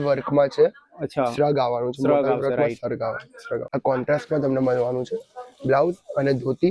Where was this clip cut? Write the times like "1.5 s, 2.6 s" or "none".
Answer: 3.6 s

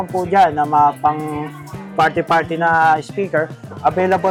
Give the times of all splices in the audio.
none

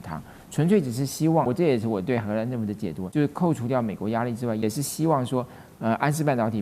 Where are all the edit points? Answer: 1.5 s, 3.0 s, 4.6 s

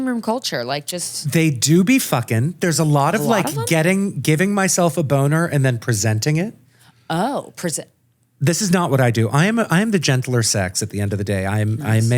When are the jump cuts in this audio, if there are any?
1.1 s

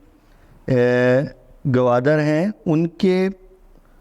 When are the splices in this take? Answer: none

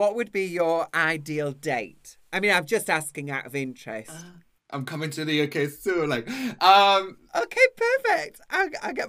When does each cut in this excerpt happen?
4.7 s

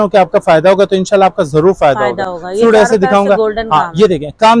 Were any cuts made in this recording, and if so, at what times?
none

